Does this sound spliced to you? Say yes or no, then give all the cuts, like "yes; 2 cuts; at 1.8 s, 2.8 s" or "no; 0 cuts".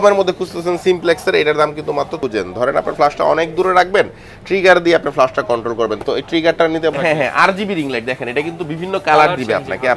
yes; 2 cuts; at 2.2 s, 6.9 s